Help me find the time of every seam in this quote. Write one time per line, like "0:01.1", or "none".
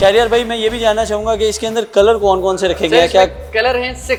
none